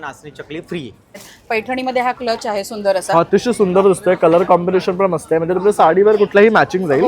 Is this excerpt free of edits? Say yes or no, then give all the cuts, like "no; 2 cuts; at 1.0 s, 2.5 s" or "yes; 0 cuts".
no; 1 cut; at 1.3 s